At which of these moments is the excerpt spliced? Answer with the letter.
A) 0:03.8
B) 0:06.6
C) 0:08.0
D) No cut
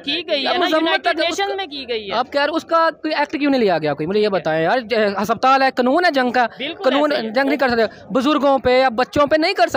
D